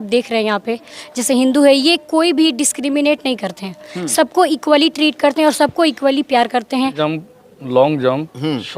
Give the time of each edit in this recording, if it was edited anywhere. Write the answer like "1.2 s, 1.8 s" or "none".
6.9 s

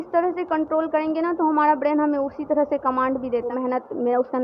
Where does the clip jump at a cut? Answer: 3.5 s

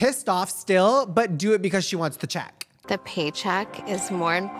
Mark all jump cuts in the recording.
2.7 s

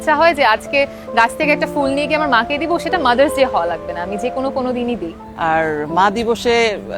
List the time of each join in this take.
5.2 s

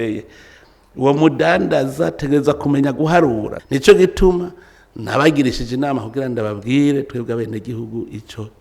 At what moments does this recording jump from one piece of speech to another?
3.5 s

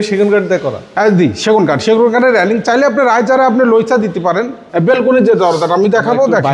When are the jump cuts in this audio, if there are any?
4.6 s

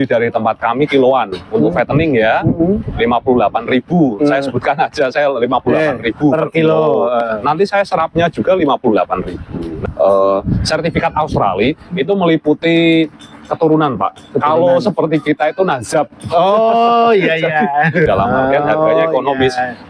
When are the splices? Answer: 9.8 s, 18.1 s

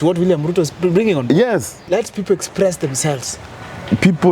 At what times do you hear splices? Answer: 1.8 s

